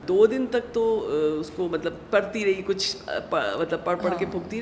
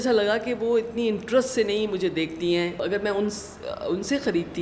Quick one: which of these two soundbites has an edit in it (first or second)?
second